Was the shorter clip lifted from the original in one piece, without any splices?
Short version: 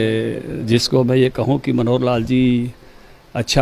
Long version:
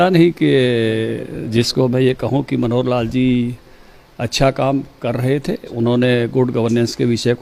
yes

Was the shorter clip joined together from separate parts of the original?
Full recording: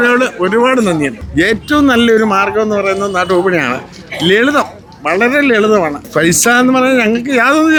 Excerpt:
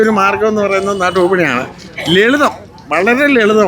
no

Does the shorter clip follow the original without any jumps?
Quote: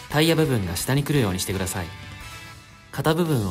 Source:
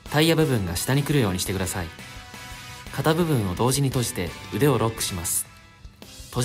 yes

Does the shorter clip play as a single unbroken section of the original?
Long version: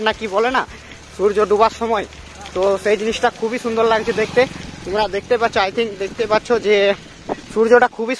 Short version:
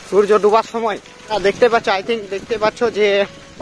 no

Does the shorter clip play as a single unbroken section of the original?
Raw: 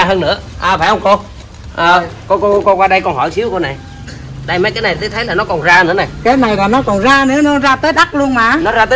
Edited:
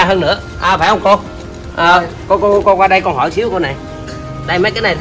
yes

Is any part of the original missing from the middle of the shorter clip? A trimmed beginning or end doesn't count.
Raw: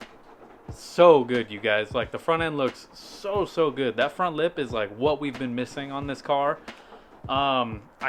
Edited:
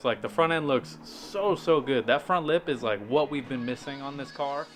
no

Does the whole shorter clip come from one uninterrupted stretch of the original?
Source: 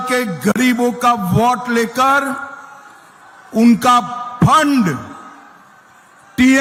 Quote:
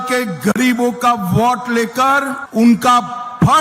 no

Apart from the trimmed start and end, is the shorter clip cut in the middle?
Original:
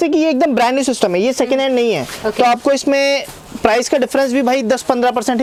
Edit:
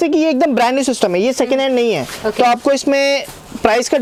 no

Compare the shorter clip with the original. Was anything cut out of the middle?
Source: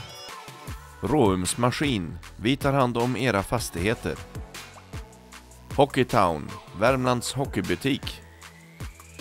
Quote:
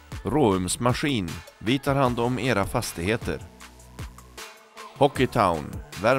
no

